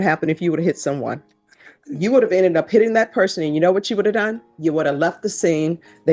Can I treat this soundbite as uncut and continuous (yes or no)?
yes